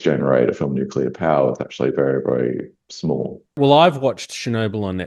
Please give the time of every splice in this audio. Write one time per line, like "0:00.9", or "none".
0:03.6